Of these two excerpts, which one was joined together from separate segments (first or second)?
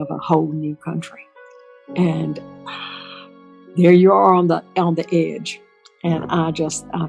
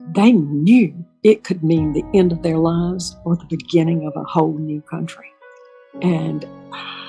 second